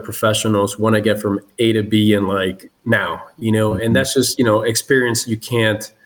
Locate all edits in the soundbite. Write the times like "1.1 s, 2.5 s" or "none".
none